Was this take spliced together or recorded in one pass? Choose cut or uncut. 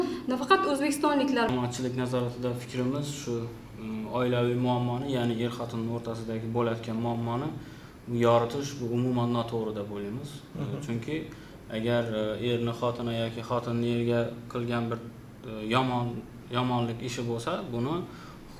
cut